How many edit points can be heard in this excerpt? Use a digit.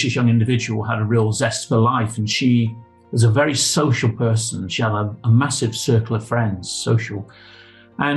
0